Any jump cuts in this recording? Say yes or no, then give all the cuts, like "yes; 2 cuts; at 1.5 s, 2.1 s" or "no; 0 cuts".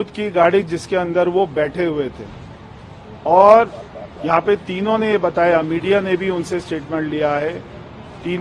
no; 0 cuts